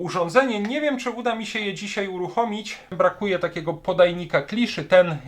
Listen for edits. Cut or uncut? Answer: cut